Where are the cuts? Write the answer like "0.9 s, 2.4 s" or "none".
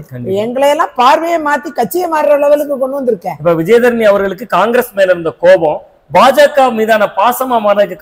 none